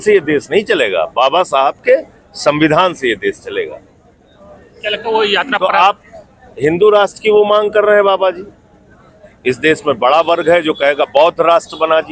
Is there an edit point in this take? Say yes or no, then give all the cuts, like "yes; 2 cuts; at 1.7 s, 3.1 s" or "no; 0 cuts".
no; 0 cuts